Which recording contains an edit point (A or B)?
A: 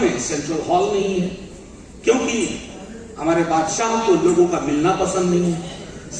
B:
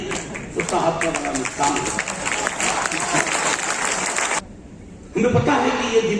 B